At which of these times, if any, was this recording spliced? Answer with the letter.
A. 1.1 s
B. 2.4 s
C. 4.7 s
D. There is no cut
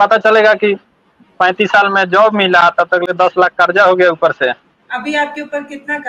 C